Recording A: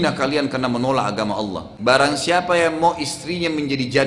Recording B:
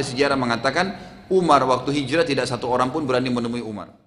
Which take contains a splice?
A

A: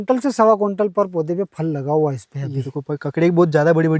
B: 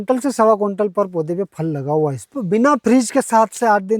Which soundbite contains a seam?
B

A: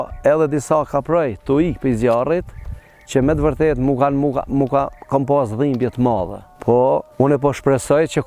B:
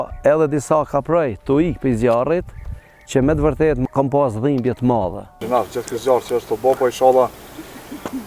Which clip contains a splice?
B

